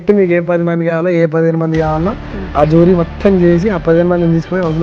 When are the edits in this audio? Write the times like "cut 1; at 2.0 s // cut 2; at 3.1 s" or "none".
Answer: none